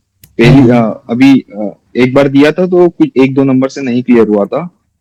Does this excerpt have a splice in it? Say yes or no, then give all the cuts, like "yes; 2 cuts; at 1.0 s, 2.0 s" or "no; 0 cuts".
no; 0 cuts